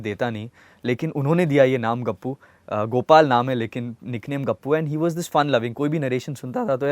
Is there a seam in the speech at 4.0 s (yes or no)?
no